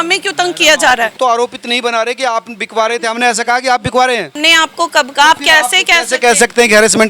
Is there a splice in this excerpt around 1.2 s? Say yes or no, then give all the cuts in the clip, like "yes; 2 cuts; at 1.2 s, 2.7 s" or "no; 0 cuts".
yes; 2 cuts; at 1.2 s, 4.3 s